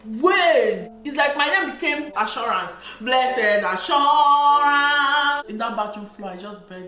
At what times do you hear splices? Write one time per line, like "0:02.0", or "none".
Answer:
0:00.9
0:02.1
0:05.5